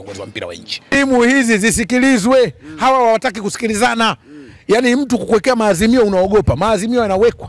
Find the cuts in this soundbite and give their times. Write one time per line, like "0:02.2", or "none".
0:00.9